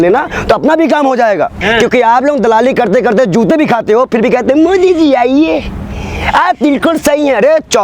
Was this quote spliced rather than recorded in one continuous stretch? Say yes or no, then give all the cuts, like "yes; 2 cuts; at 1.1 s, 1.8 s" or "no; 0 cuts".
yes; 1 cut; at 1.6 s